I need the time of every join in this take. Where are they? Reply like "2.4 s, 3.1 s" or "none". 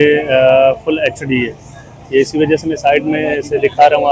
none